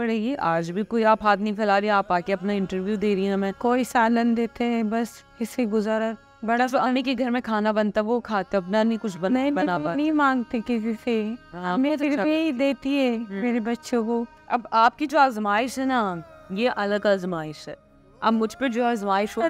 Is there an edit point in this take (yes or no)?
yes